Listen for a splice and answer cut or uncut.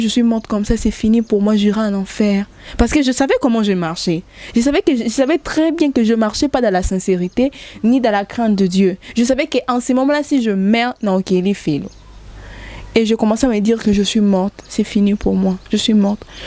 uncut